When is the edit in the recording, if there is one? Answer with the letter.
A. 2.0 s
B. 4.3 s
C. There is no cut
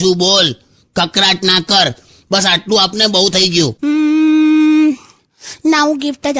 C